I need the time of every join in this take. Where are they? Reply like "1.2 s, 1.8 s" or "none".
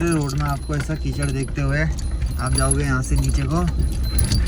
none